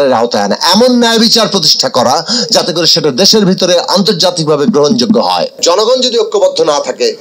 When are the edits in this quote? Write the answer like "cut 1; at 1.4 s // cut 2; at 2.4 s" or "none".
cut 1; at 5.5 s

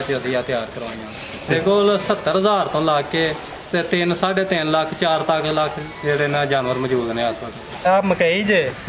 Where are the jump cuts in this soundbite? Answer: cut 1; at 1.5 s // cut 2; at 7.9 s

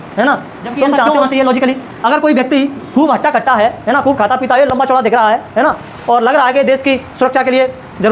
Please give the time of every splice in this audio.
cut 1; at 1.1 s

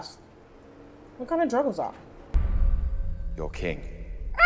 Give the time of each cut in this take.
cut 1; at 2.3 s

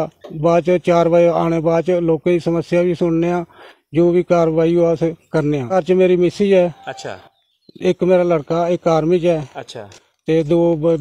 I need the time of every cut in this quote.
cut 1; at 5.7 s

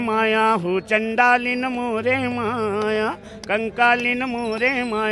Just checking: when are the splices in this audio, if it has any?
none

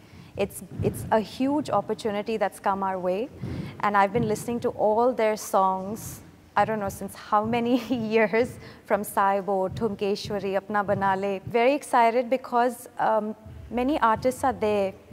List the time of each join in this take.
cut 1; at 11.4 s

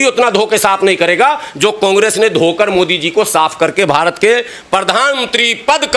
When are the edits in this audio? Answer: none

